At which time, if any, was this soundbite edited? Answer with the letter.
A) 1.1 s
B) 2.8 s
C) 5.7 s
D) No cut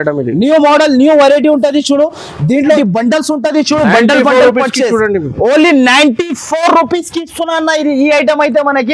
B